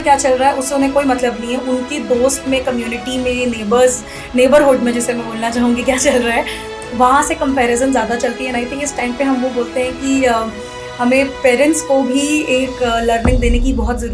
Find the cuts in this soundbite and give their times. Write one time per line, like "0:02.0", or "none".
none